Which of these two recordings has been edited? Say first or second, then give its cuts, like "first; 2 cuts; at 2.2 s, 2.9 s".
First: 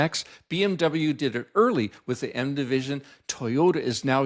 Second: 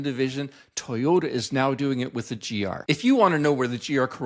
second; 1 cut; at 2.8 s